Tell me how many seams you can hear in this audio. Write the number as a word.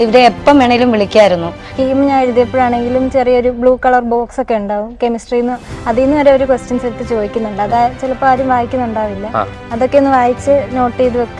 one